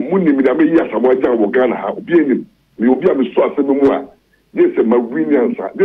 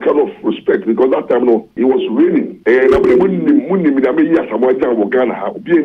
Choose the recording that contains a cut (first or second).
second